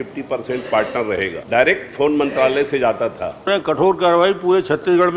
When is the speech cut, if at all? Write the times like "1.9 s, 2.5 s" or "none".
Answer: 1.4 s, 3.5 s